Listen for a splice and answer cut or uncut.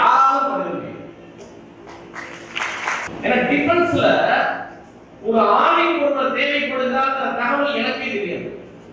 cut